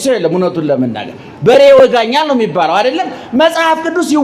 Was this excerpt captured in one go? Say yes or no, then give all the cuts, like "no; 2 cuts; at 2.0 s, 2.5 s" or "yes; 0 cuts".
yes; 0 cuts